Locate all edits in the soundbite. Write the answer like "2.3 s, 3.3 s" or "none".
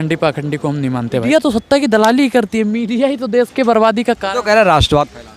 1.2 s